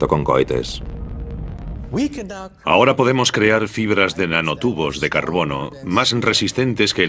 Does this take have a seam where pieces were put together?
yes; 1 cut; at 4.2 s

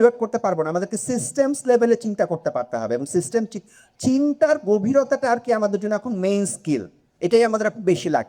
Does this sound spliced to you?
no; 0 cuts

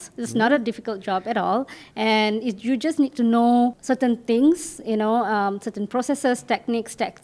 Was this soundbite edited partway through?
yes; 1 cut; at 3.8 s

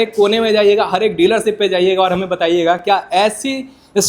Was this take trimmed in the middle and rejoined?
no; 0 cuts

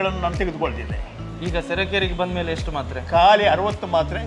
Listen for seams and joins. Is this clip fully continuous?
no; 1 cut; at 1.3 s

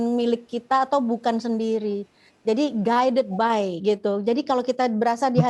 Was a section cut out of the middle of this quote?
no; 0 cuts

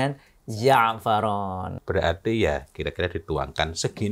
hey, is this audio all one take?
no; 1 cut; at 1.8 s

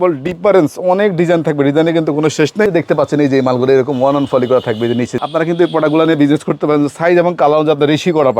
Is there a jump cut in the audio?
yes; 2 cuts; at 2.7 s, 5.1 s

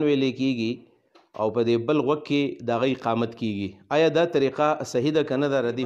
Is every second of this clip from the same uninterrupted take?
yes; 0 cuts

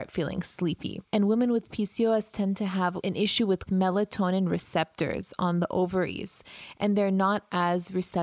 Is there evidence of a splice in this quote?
yes; 1 cut; at 3.0 s

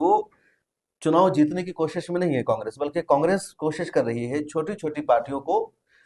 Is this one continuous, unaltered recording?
yes; 0 cuts

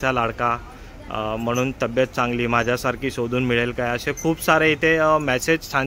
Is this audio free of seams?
yes; 0 cuts

